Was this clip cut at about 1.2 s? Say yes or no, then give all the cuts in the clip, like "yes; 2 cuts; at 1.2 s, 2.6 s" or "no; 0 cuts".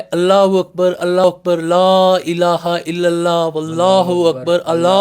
yes; 1 cut; at 1.2 s